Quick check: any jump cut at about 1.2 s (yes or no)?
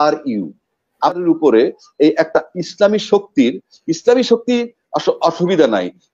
yes